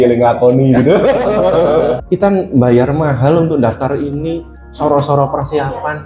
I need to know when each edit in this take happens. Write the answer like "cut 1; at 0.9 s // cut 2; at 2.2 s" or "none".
cut 1; at 2.0 s